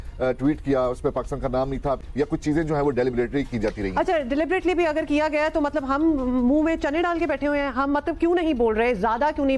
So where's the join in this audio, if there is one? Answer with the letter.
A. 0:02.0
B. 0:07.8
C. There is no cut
A